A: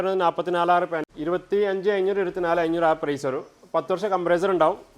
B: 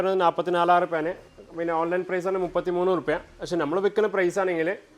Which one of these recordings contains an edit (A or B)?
A